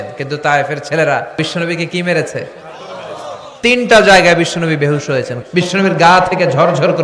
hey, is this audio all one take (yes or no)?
no